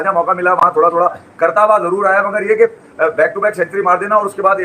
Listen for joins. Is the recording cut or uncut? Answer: uncut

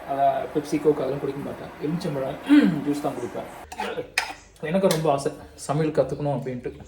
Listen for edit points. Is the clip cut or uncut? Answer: cut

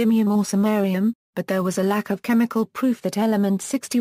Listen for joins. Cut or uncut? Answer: cut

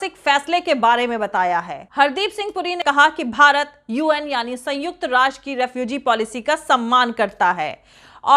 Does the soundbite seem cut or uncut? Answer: cut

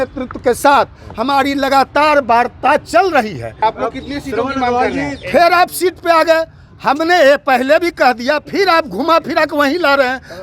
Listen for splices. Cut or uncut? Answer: cut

